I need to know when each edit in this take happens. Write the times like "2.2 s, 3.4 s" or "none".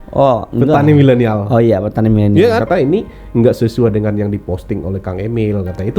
2.6 s